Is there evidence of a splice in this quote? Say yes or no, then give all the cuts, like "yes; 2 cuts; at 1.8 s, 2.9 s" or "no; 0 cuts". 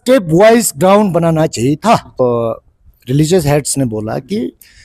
yes; 1 cut; at 2.2 s